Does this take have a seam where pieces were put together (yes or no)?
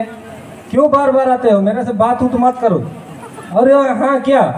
no